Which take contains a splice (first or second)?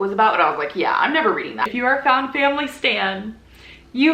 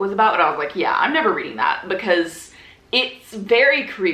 first